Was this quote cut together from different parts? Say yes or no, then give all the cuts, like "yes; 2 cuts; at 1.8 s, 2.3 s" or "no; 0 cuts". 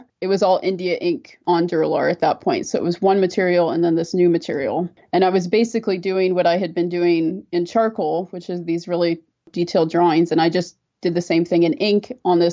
yes; 1 cut; at 9.5 s